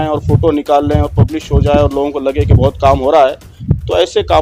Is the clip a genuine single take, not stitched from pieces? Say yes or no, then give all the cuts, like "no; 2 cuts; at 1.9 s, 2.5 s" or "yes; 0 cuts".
yes; 0 cuts